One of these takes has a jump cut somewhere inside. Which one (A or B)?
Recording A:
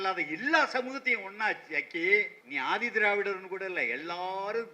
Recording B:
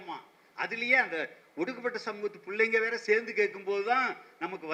A